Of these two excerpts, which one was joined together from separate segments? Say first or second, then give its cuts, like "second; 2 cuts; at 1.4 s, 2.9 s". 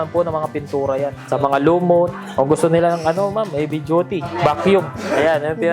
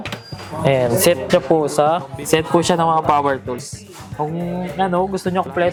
first; 2 cuts; at 2.2 s, 4.3 s